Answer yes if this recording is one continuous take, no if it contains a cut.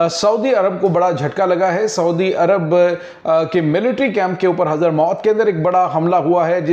yes